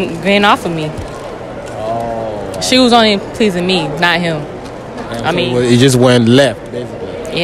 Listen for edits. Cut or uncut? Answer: uncut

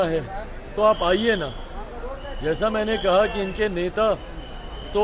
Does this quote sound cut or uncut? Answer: uncut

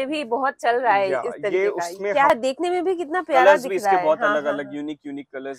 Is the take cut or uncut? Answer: cut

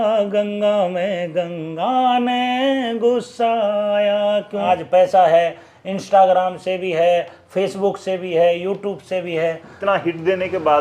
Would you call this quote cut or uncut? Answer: cut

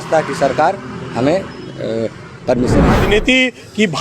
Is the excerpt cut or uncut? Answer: cut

